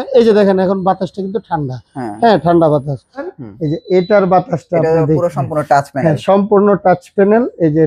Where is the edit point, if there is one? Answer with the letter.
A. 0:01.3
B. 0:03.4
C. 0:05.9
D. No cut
B